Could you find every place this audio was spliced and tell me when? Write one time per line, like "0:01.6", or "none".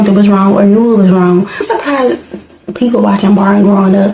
0:01.6

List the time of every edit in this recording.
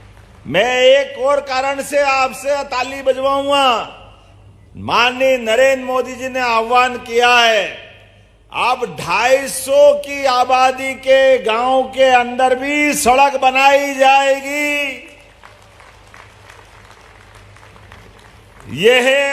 none

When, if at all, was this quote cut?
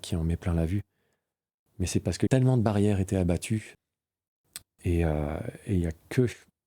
0:02.3
0:03.7

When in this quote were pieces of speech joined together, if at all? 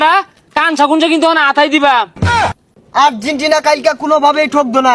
0:02.5

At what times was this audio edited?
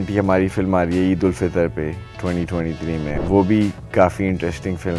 0:03.2

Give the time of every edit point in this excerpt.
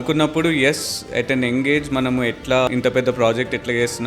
0:02.7

